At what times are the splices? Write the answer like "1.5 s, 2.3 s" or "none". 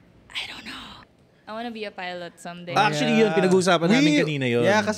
1.0 s